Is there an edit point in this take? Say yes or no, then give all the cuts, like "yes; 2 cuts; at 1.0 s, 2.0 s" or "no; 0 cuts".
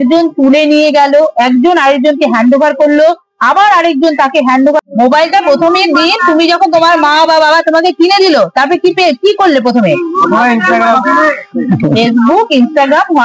yes; 1 cut; at 4.8 s